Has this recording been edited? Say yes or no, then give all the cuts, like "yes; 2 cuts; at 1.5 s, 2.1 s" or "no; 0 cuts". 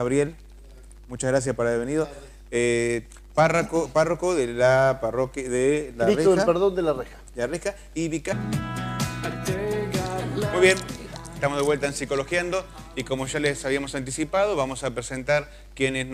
no; 0 cuts